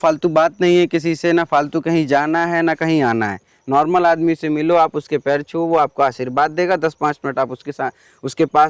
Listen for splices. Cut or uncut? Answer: uncut